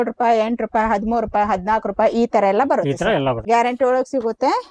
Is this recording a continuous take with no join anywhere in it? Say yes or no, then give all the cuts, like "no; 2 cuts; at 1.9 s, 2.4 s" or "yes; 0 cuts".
no; 1 cut; at 3.4 s